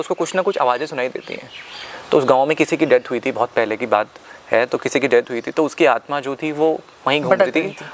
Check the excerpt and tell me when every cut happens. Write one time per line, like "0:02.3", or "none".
none